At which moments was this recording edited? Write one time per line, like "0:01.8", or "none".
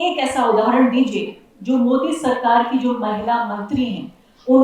none